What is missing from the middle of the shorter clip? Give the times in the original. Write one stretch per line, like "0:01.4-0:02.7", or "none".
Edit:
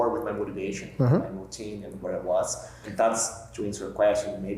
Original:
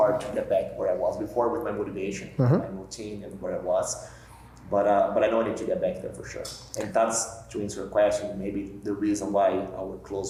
0:04.1-0:06.7